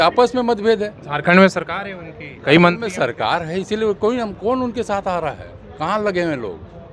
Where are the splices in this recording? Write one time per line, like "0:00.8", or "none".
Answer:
none